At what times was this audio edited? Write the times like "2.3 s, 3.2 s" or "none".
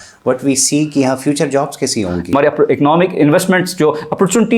2.3 s